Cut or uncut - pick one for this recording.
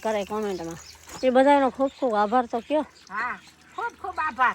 uncut